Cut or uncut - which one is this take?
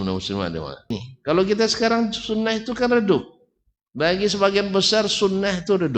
cut